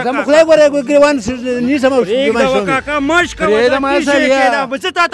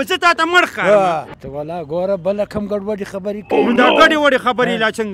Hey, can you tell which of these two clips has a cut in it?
second; 1 cut; at 1.4 s

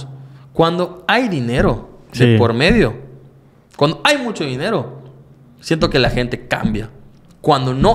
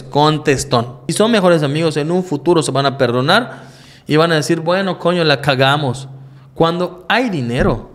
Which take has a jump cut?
second; 1 cut; at 1.0 s

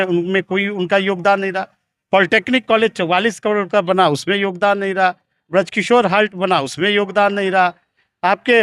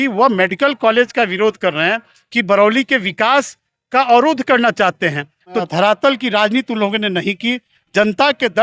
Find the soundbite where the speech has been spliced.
second; 1 cut; at 5.6 s

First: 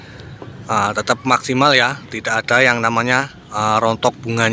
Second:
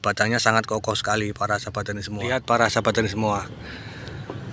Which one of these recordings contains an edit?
second; 1 cut; at 2.3 s

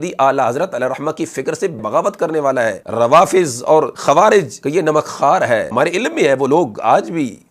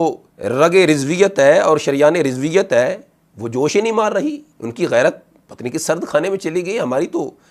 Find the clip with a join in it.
first; 5 cuts; at 1.8 s, 2.8 s, 3.9 s, 4.6 s, 5.7 s

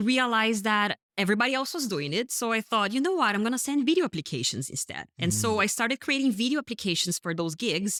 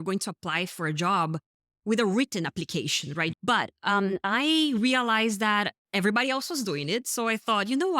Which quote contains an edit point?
second; 1 cut; at 3.3 s

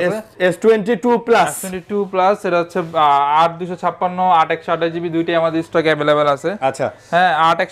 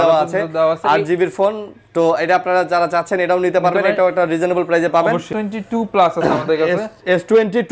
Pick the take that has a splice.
second; 1 cut; at 5.3 s

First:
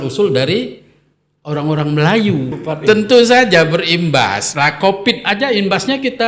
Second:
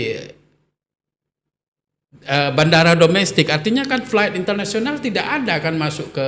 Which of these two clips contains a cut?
first; 1 cut; at 2.6 s

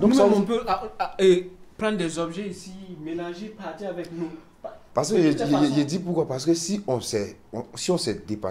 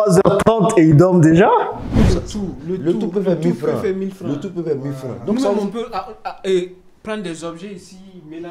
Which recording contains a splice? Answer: second; 1 cut; at 2.0 s

